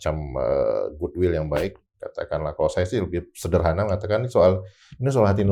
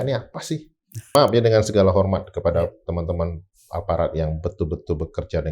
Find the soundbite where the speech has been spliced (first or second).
second